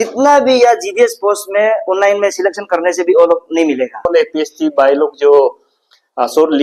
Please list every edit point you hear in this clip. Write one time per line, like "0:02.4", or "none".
0:04.1